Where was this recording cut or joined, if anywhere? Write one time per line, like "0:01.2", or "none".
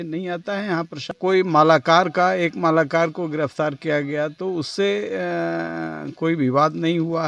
0:01.1